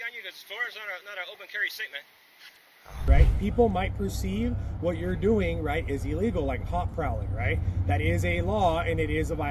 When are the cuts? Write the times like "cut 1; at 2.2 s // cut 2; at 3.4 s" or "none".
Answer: cut 1; at 3.1 s